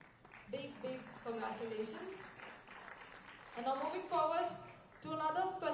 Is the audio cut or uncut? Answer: uncut